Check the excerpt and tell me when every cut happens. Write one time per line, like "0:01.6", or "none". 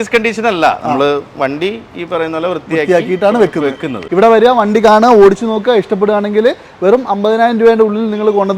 0:03.9